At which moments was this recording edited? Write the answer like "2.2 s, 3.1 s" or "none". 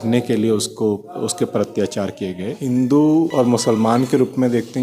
2.5 s, 3.3 s